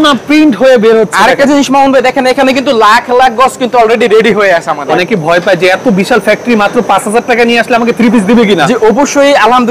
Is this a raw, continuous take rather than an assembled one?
no; 1 cut; at 4.8 s

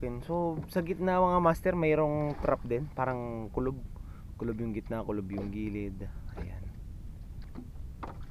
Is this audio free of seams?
no; 1 cut; at 7.4 s

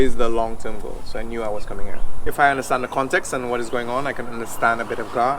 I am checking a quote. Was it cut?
yes; 1 cut; at 2.3 s

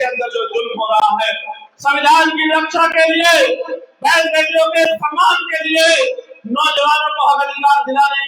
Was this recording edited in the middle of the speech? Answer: no; 0 cuts

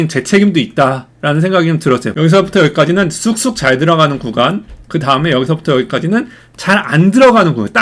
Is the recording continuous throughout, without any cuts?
no; 1 cut; at 2.1 s

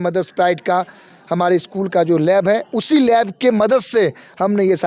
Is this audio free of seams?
yes; 0 cuts

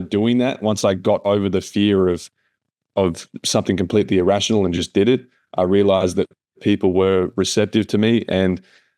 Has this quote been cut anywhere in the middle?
no; 0 cuts

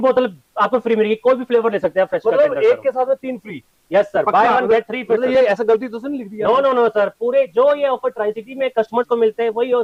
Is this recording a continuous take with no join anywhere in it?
yes; 0 cuts

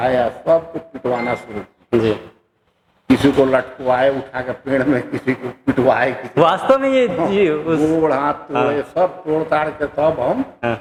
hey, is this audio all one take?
yes; 0 cuts

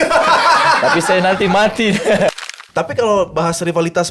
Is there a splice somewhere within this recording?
yes; 1 cut; at 2.3 s

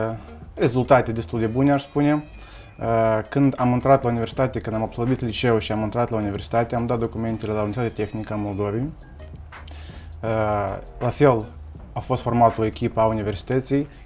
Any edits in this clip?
yes; 1 cut; at 8.1 s

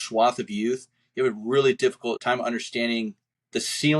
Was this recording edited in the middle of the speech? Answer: yes; 1 cut; at 2.2 s

